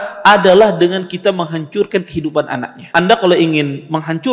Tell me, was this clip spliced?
yes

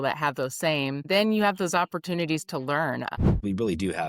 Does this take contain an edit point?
yes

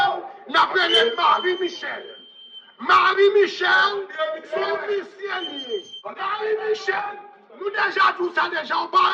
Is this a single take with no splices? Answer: no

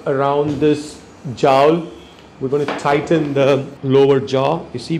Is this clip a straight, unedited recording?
no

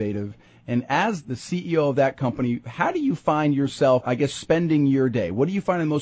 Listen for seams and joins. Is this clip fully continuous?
no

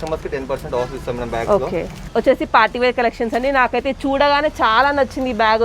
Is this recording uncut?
no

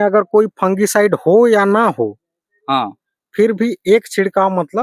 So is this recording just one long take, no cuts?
yes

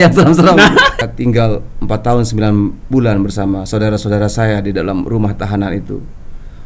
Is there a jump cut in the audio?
yes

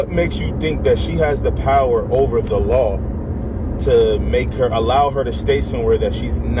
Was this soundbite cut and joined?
no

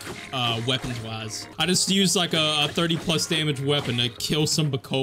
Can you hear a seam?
yes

